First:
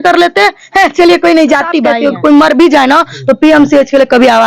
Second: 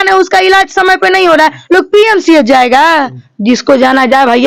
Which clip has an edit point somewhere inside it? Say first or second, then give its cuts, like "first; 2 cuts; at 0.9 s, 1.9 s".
first; 1 cut; at 1.9 s